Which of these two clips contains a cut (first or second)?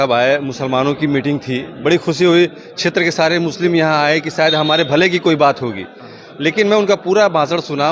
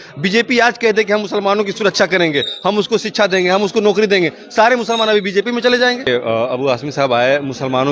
second